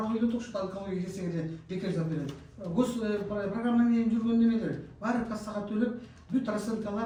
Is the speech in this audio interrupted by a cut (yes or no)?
no